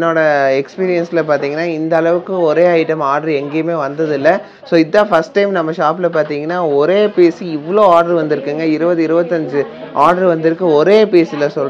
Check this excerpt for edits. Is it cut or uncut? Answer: uncut